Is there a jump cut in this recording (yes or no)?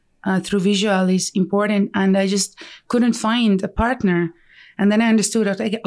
no